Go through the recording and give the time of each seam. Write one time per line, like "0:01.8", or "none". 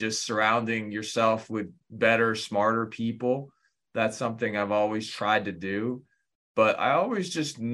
0:01.8